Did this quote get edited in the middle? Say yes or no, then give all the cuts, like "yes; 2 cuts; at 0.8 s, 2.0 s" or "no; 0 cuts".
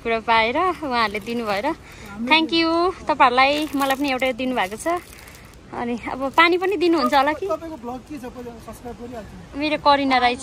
no; 0 cuts